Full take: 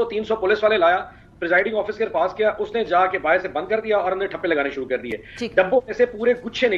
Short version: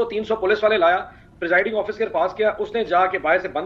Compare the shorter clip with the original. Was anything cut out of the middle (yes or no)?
no